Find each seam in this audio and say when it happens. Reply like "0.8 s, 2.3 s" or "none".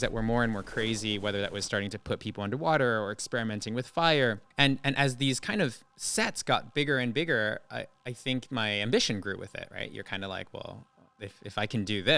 4.4 s